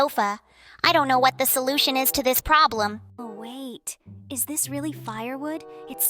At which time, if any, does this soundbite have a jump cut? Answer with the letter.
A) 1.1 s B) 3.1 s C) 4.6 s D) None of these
B